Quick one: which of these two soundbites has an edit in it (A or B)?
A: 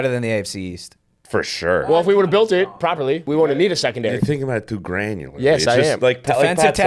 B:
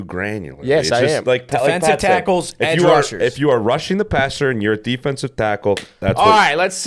A